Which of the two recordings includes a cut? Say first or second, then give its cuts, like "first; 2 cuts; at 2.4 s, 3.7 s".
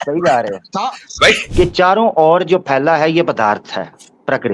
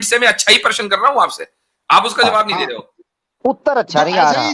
first; 1 cut; at 1.4 s